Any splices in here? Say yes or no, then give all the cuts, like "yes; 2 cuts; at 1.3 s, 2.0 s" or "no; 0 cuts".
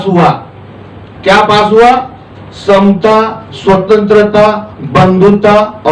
no; 0 cuts